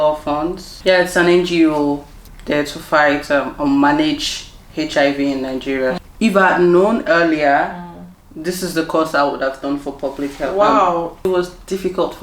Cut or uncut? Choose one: cut